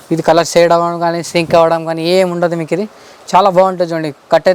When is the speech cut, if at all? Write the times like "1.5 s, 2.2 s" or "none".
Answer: none